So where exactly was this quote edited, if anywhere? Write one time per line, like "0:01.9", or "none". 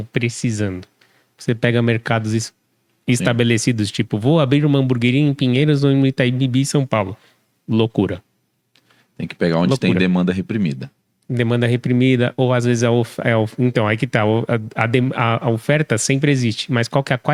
none